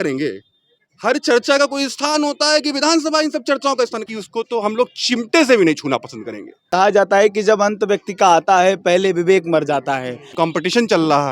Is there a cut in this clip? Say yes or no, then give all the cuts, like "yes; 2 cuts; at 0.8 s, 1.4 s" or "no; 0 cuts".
yes; 3 cuts; at 4.0 s, 6.7 s, 10.2 s